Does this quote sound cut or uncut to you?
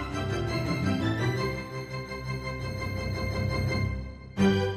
uncut